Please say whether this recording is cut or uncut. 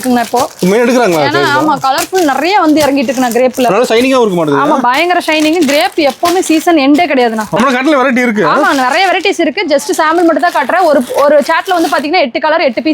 cut